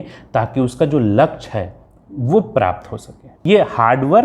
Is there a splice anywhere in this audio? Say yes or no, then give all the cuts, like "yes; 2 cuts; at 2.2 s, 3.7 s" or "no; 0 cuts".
yes; 1 cut; at 3.3 s